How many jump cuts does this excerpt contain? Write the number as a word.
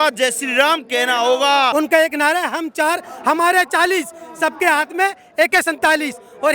one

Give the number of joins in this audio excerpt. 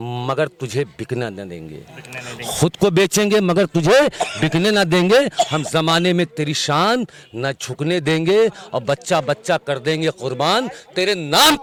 zero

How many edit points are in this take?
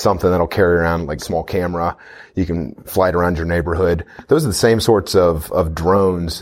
one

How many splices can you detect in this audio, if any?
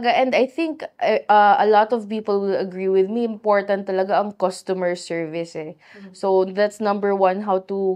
zero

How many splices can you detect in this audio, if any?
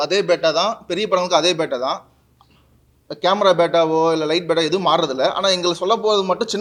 zero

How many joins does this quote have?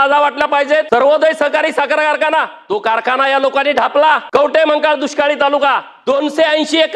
four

